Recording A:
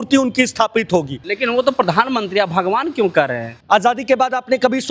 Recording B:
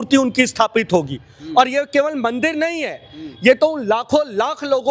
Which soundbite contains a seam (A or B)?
A